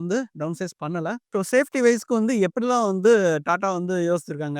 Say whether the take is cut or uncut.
cut